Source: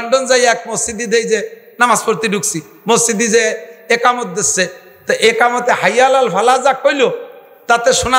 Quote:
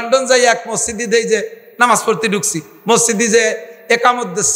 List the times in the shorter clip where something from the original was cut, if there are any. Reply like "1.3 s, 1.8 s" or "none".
none